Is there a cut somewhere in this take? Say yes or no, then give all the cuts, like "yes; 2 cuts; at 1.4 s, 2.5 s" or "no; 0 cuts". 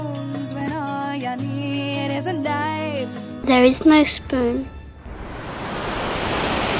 no; 0 cuts